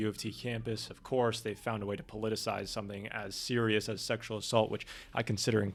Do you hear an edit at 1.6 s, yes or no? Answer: no